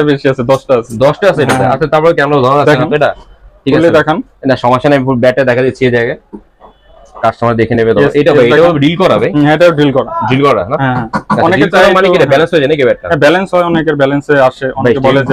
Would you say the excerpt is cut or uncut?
uncut